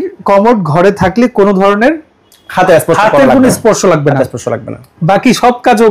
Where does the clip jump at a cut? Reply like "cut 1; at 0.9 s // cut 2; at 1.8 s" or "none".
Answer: none